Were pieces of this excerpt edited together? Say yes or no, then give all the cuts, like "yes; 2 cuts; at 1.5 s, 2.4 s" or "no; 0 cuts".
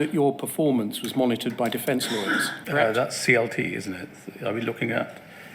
yes; 1 cut; at 2.5 s